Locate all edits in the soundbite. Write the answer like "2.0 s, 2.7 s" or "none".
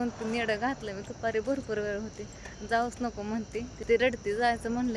3.7 s